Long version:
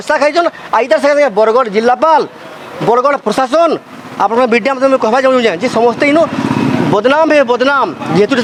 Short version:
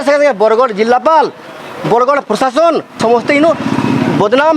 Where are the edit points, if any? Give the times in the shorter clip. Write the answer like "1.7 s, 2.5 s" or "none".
2.9 s

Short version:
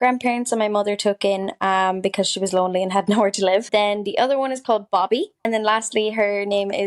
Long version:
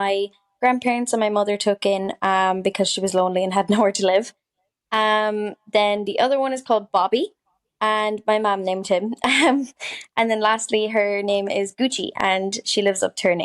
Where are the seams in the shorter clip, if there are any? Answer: 3.7 s, 5.5 s

